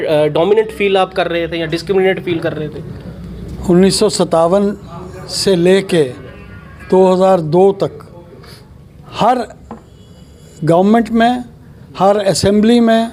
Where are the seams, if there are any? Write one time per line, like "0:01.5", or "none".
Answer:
none